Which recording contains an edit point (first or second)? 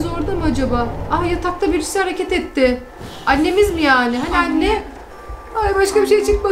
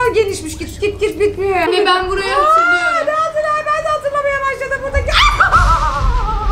second